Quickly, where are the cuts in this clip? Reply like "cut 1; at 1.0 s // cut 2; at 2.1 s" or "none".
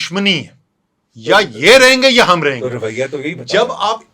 none